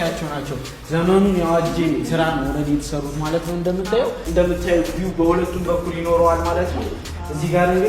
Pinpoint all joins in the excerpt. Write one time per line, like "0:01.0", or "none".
0:04.2

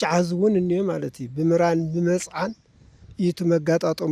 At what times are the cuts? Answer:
none

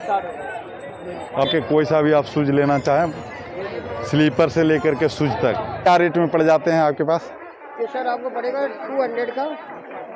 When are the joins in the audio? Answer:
0:01.5
0:05.9

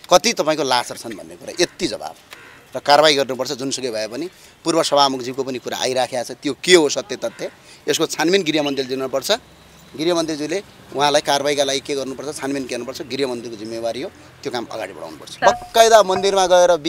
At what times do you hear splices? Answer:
0:15.3

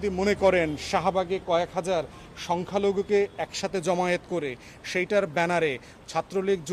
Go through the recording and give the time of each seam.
none

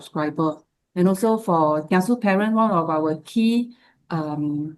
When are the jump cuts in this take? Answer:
none

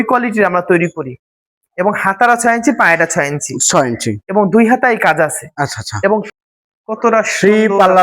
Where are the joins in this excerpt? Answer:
0:06.3

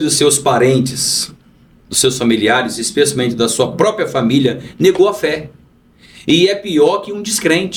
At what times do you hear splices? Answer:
none

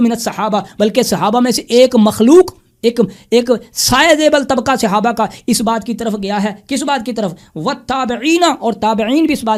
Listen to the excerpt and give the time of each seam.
none

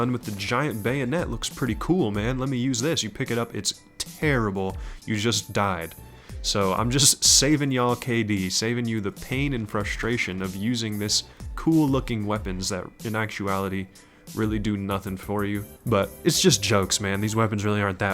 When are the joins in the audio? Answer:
0:15.7

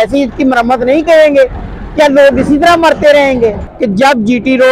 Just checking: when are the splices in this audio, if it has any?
0:03.7

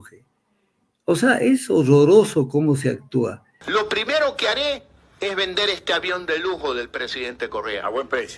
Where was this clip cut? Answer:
0:03.5

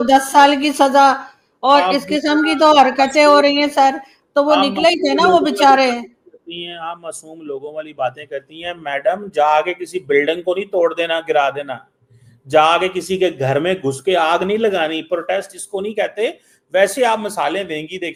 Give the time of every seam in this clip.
none

